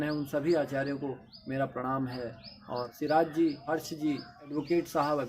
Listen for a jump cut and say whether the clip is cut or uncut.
cut